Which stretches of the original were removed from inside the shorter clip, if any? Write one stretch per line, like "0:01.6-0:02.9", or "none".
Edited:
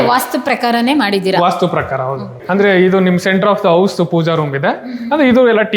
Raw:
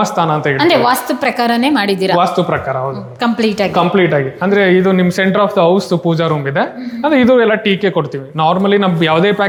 0:03.1-0:04.3